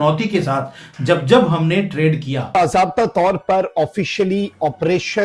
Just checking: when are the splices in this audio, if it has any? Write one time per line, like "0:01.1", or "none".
0:02.3